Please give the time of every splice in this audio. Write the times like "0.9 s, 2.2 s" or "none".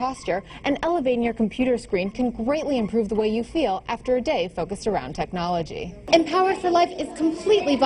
6.0 s